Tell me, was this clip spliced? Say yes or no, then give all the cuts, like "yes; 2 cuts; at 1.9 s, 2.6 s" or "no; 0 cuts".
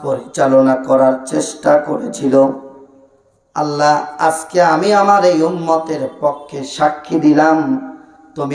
no; 0 cuts